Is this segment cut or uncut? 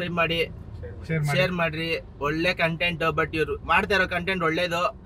uncut